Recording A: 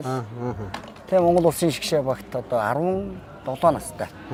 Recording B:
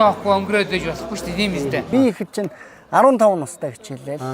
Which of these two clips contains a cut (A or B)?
B